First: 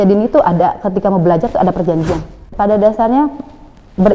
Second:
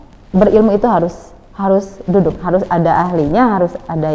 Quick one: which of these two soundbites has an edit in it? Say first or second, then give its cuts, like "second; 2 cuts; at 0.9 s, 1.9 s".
first; 1 cut; at 2.5 s